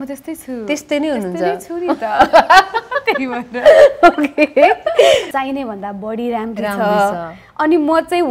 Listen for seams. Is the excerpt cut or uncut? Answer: cut